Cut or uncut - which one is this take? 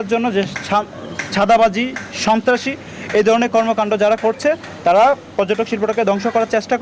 uncut